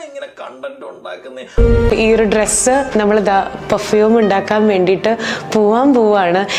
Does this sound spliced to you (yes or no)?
yes